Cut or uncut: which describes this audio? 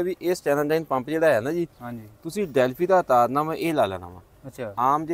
uncut